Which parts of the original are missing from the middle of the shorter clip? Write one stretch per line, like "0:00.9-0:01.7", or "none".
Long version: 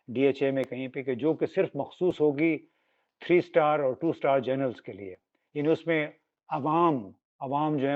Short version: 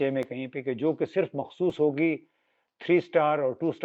none